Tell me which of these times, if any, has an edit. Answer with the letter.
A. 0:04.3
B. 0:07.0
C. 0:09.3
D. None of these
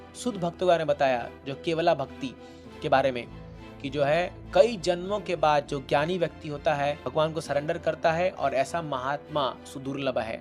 B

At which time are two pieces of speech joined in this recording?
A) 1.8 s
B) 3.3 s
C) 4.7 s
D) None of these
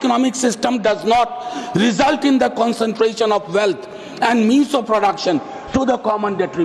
D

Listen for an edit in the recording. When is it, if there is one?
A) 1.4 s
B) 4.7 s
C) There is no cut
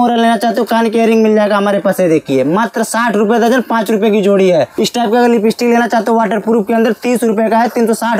B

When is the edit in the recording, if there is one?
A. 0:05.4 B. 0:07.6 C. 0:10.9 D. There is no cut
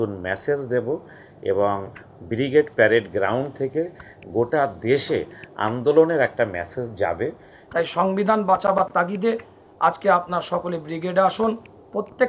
B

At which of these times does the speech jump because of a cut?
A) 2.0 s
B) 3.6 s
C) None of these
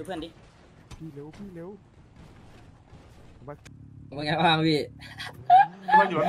B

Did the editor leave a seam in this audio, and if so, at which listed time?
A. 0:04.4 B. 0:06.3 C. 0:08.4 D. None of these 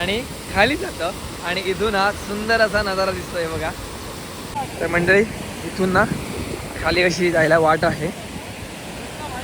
A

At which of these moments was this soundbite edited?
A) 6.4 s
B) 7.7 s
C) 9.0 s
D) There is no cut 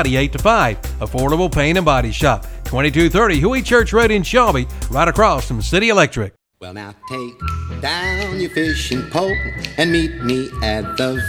A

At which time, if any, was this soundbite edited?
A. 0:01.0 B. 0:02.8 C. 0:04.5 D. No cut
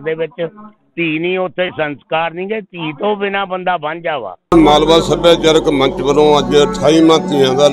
C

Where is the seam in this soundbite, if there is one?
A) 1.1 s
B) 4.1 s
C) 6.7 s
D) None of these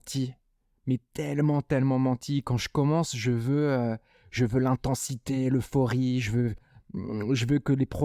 C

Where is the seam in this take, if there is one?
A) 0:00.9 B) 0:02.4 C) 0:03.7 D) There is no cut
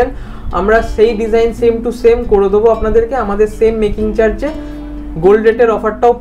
D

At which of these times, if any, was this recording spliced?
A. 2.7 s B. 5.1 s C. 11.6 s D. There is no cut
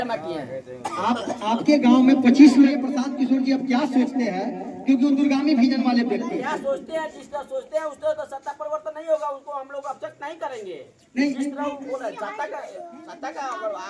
A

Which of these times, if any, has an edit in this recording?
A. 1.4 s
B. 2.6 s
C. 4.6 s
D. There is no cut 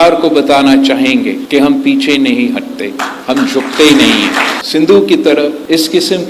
C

